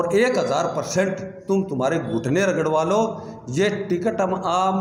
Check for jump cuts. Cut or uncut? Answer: uncut